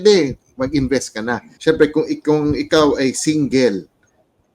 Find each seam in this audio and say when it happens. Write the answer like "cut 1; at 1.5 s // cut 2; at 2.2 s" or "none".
cut 1; at 1.5 s